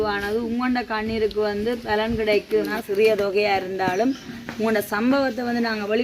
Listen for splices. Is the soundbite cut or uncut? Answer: cut